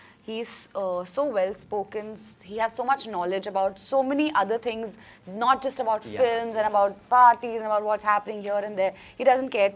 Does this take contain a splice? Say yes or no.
no